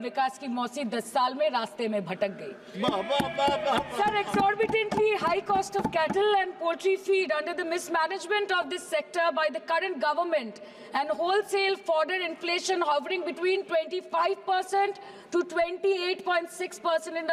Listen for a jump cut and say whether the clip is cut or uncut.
uncut